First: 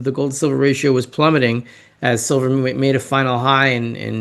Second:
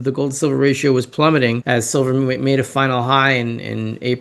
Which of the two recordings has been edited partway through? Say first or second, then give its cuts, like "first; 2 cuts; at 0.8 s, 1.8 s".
second; 1 cut; at 1.6 s